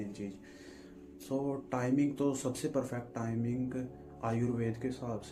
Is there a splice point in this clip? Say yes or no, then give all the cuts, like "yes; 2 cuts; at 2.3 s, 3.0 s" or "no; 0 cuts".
no; 0 cuts